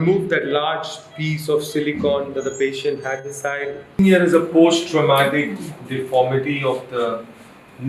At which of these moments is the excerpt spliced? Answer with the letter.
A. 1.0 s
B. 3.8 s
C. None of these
B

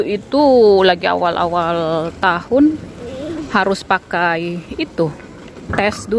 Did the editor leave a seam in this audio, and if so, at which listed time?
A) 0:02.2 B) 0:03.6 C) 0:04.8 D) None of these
D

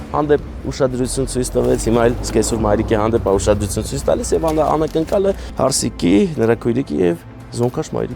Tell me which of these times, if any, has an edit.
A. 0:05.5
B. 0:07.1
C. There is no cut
A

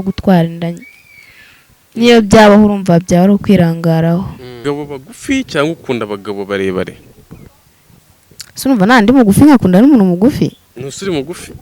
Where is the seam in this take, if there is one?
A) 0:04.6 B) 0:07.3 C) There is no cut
A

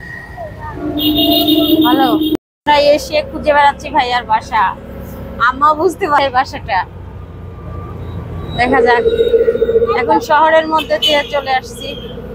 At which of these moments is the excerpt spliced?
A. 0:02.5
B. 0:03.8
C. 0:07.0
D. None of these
A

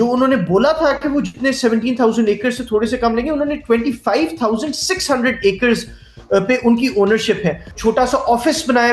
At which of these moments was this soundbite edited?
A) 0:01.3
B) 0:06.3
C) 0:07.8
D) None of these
C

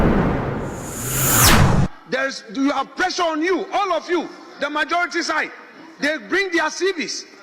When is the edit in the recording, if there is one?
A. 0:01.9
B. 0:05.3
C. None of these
A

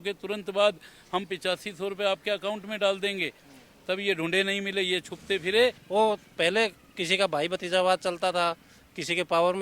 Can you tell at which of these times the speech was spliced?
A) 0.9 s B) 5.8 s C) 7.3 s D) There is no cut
B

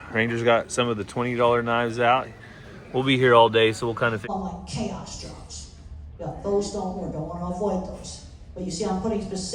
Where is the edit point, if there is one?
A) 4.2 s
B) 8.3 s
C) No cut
A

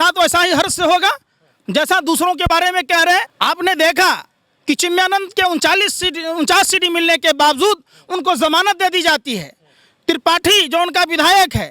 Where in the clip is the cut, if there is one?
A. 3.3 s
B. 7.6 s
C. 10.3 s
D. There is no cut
A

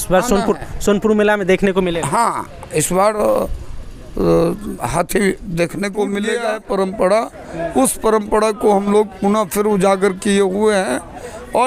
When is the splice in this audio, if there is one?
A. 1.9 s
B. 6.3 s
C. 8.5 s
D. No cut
B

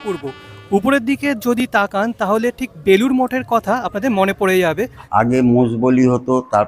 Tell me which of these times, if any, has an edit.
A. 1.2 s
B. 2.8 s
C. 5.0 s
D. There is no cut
C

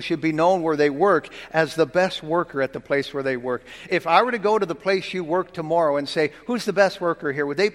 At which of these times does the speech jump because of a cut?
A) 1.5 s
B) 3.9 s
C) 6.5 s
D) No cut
B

